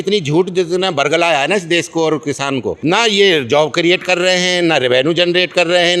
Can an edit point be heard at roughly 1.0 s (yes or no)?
no